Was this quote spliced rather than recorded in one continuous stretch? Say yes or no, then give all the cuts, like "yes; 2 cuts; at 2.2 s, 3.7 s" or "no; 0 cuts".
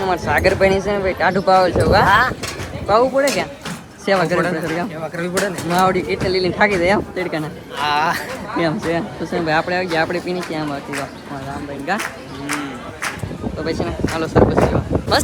no; 0 cuts